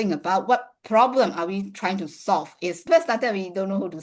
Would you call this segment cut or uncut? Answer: cut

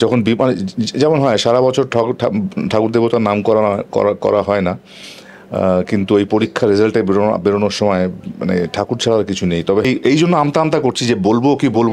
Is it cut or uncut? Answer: cut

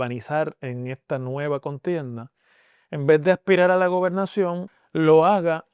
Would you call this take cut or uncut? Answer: cut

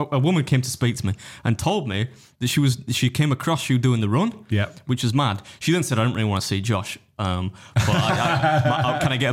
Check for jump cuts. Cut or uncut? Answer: uncut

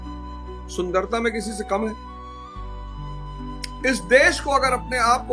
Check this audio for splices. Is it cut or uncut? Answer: cut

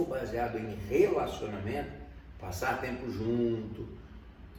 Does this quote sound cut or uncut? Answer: uncut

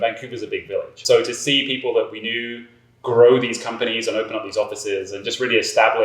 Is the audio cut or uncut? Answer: cut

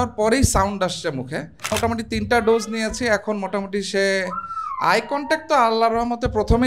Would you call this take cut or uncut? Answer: cut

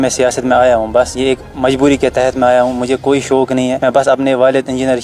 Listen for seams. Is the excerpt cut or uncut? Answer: cut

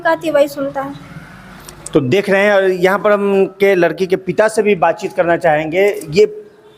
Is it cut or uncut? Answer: uncut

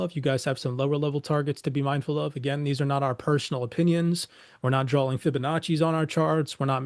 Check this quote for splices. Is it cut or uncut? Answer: uncut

